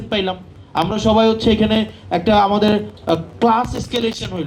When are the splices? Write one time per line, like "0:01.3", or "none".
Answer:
none